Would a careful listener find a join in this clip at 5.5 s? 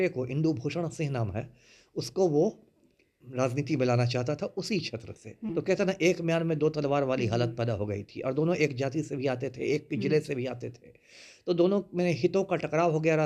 yes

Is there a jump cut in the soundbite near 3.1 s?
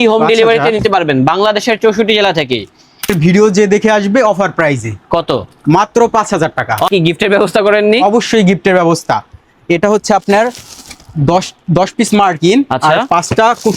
yes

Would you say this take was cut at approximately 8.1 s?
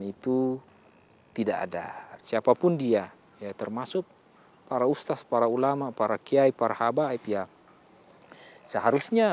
no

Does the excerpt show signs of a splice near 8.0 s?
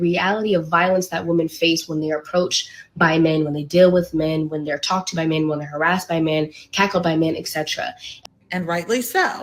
yes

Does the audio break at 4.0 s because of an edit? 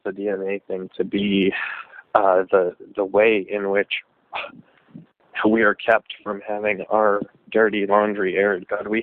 no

